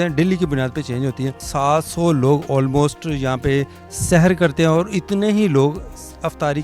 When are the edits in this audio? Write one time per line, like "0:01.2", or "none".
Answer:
0:01.5